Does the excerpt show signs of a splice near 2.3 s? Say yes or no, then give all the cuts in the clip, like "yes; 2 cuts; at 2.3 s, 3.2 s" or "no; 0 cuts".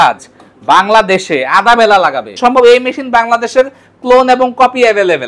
yes; 1 cut; at 2.3 s